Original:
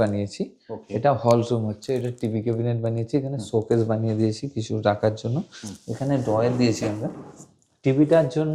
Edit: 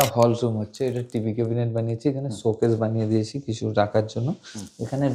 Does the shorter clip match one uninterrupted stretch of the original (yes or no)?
yes